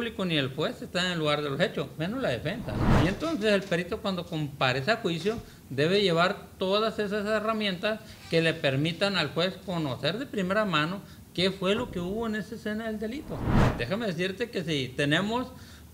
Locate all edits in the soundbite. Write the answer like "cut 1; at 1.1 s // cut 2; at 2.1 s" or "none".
cut 1; at 2.9 s // cut 2; at 13.6 s